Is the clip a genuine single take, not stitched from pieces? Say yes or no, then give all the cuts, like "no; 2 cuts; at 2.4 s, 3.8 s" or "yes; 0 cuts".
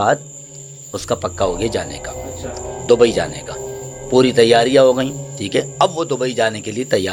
yes; 0 cuts